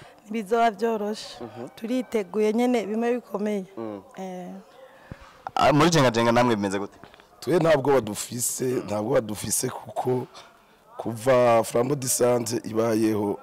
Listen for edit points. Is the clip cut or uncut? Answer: uncut